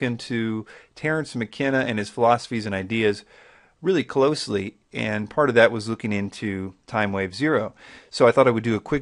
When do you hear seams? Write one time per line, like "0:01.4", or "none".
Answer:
none